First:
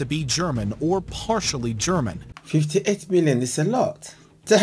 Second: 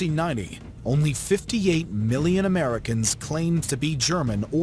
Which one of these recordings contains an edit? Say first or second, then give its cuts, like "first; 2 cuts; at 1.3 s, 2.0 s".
first; 1 cut; at 2.2 s